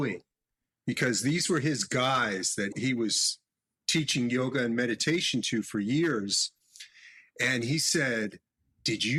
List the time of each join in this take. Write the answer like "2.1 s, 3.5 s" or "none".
none